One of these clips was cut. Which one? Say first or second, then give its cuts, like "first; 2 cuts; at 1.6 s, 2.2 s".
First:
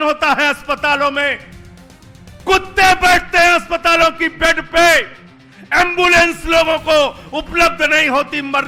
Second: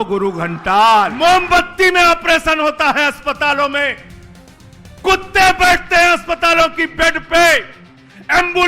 second; 1 cut; at 1.1 s